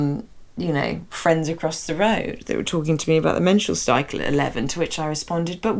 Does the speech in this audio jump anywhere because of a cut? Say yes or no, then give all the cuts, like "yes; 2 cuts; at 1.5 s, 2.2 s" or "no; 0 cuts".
no; 0 cuts